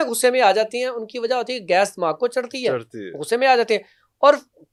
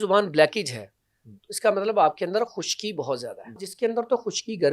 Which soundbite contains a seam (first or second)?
second